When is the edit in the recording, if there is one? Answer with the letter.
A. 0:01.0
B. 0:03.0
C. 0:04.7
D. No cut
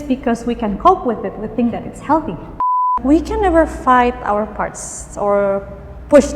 B